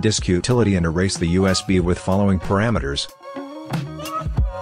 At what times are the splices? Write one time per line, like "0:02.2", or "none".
0:03.1